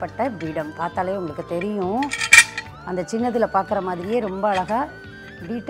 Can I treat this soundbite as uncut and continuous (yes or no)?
yes